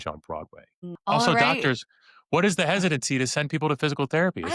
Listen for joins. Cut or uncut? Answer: cut